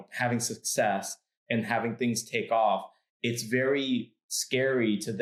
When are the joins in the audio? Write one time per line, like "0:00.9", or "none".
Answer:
none